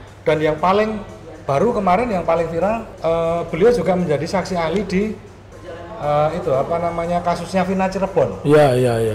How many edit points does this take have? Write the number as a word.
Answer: one